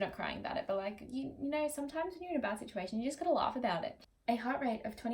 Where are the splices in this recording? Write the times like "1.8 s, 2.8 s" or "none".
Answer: 4.0 s

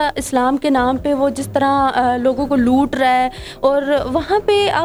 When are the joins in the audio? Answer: none

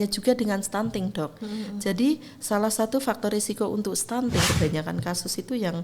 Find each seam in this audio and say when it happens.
4.5 s

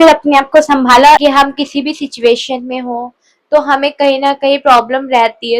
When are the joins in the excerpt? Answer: 1.2 s

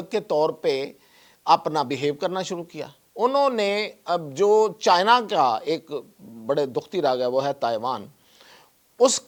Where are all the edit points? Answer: none

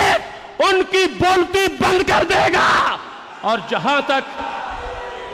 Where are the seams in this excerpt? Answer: none

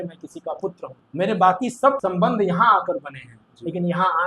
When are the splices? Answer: 1.0 s, 2.0 s

